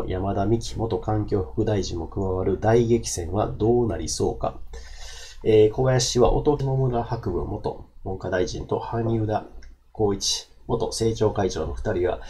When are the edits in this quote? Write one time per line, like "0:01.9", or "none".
0:06.6